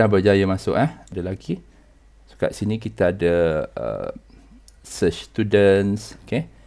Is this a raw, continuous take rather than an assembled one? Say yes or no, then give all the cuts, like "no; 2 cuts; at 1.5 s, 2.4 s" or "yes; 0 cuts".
no; 1 cut; at 1.0 s